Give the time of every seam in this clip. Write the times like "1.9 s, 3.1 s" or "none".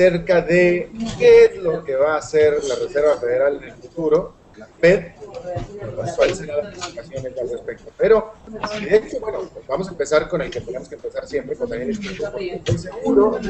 12.1 s